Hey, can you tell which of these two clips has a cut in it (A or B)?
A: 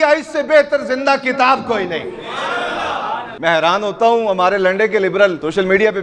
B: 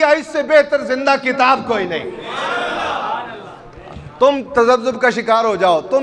A